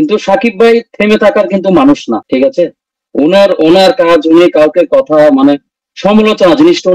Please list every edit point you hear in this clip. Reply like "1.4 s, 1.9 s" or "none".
none